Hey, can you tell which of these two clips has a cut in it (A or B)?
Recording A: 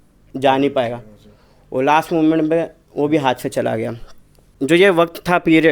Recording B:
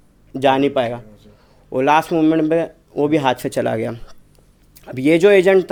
A